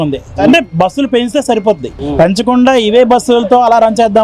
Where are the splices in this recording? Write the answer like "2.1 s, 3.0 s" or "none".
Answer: 2.0 s